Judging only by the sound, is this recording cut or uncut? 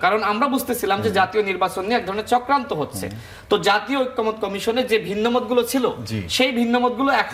uncut